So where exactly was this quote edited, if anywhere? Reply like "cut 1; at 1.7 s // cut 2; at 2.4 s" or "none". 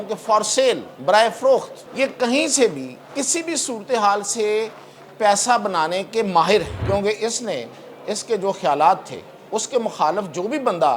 cut 1; at 0.9 s // cut 2; at 1.8 s // cut 3; at 6.7 s